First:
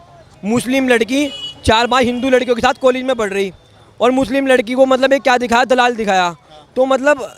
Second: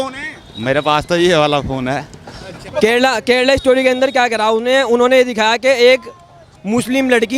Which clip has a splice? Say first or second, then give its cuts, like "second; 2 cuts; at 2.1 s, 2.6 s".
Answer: second; 1 cut; at 2.7 s